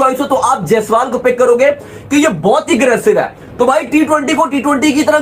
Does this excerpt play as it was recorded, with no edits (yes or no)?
yes